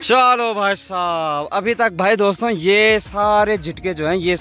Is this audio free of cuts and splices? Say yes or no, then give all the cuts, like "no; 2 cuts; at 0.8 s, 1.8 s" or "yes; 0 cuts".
yes; 0 cuts